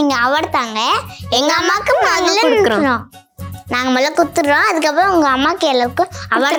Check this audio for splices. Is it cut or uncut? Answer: uncut